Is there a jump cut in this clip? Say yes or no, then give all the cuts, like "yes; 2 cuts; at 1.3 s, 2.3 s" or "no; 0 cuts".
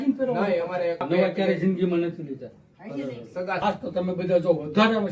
yes; 2 cuts; at 1.0 s, 3.6 s